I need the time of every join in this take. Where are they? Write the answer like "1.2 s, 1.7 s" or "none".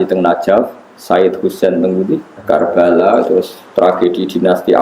2.3 s